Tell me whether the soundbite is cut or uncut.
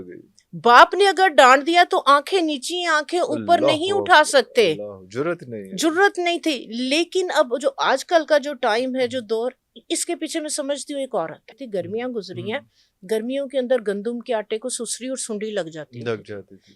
cut